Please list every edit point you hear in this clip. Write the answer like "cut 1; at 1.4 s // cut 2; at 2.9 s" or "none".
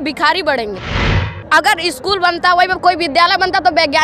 cut 1; at 1.2 s